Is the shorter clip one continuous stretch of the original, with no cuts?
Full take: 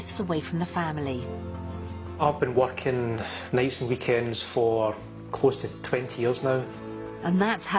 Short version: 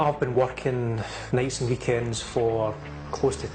yes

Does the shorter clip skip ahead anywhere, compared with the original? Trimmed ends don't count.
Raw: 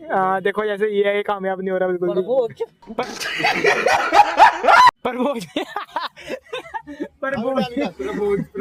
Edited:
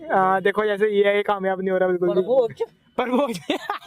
yes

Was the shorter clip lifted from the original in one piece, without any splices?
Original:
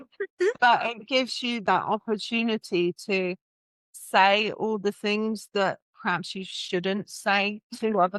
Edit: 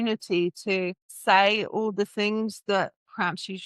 no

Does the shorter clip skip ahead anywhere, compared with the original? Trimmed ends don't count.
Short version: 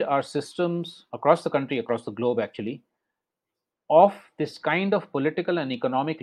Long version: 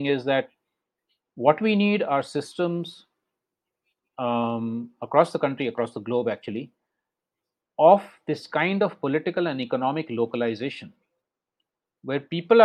yes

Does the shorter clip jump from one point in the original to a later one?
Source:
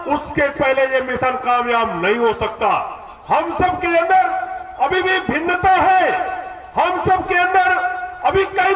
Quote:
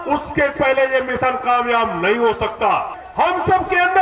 yes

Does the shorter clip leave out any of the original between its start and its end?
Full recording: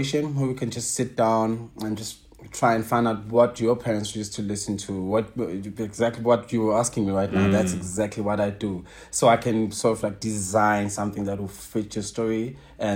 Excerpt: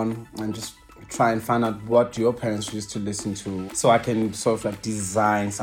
yes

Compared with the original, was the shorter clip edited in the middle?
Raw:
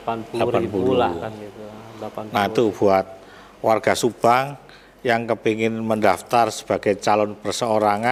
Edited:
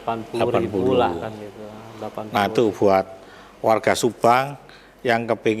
no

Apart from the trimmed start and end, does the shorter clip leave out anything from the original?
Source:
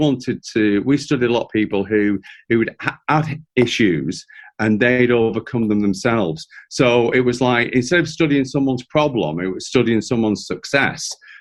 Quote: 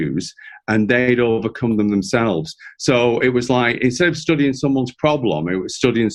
no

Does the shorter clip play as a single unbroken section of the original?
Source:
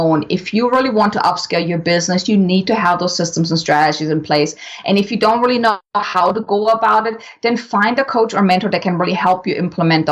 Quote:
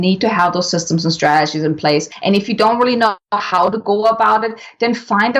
no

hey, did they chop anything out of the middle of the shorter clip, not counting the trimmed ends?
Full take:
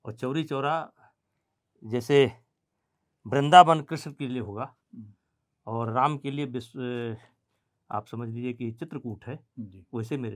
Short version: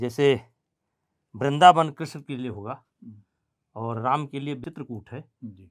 yes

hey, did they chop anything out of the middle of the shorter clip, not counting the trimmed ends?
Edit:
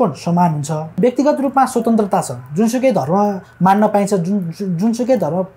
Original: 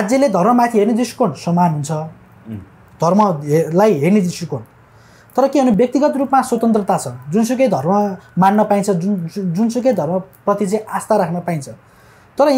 yes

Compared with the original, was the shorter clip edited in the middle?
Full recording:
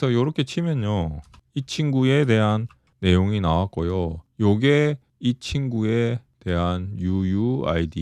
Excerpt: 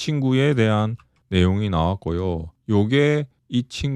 no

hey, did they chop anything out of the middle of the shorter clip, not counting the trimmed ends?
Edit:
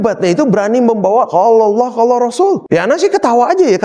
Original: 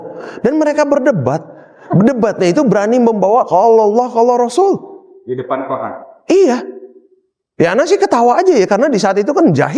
yes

